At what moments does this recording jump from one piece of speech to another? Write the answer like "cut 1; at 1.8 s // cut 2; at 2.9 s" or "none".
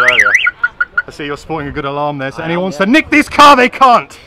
none